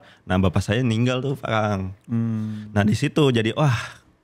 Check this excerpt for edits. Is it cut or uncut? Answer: uncut